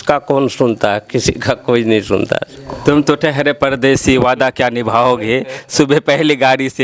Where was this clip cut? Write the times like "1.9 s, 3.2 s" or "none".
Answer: none